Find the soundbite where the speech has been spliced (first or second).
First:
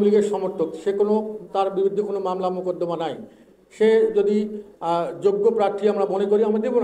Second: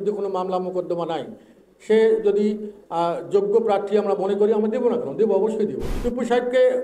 second